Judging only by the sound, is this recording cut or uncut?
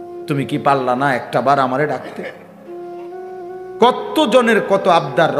cut